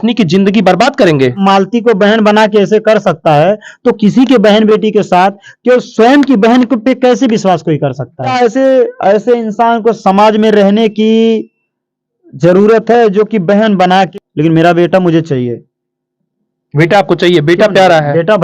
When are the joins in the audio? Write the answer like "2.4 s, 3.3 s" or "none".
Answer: 1.4 s, 8.2 s, 14.1 s